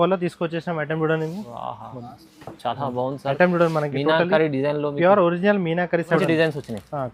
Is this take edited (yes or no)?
yes